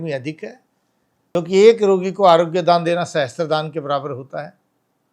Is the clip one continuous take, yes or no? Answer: no